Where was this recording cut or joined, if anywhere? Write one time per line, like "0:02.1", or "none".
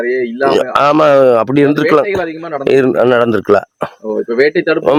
none